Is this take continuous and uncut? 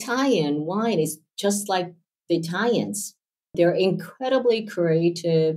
yes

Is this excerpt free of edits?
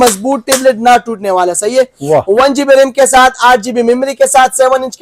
yes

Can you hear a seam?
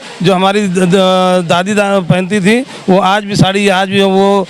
no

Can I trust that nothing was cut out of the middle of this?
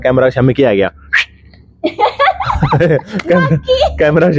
yes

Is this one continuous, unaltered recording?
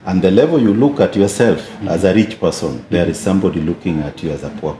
yes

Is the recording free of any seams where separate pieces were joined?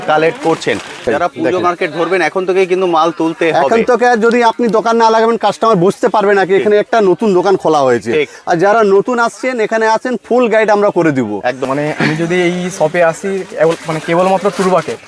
no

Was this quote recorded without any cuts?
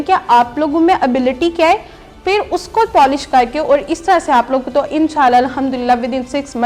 no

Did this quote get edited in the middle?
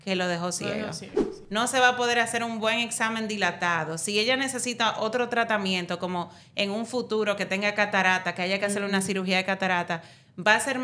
yes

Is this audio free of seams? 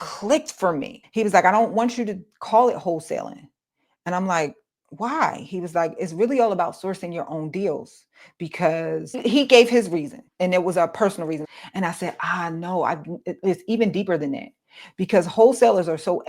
no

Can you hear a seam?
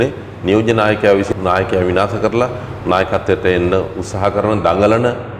yes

